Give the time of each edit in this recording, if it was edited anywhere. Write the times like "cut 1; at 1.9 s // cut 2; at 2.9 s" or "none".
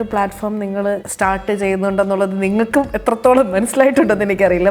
cut 1; at 1.1 s